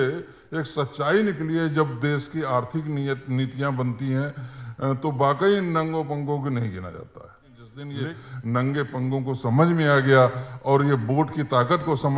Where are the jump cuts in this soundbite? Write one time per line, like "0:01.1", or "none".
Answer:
0:07.8